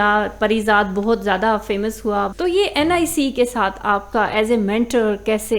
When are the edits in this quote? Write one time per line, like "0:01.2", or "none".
0:02.3